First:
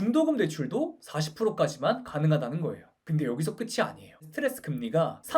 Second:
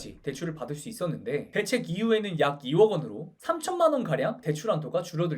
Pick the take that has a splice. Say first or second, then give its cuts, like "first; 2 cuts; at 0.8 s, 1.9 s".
first; 2 cuts; at 2.9 s, 4.2 s